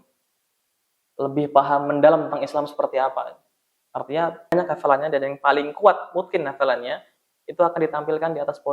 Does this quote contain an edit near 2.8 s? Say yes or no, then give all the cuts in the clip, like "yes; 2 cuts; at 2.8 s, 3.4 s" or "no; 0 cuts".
no; 1 cut; at 4.5 s